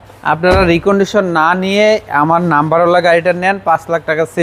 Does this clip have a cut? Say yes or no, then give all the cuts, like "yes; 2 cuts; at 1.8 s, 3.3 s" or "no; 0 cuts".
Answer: no; 0 cuts